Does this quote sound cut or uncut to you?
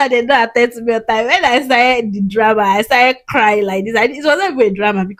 uncut